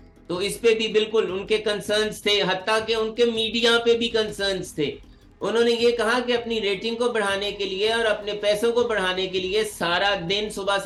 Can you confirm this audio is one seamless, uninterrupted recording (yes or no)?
yes